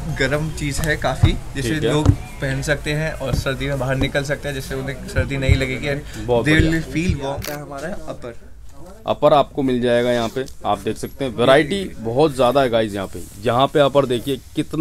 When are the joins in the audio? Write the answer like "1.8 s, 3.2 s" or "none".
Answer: 7.4 s